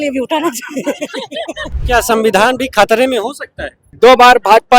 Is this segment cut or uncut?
cut